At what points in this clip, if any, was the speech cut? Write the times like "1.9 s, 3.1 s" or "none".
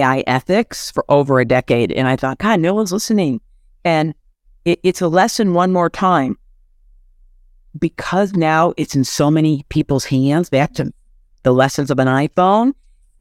none